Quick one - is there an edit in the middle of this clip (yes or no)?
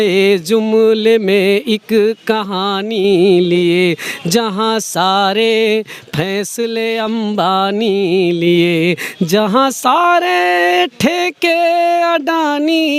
no